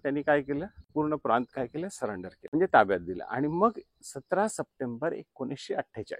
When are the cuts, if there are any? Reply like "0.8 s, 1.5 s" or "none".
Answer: 0.9 s, 2.3 s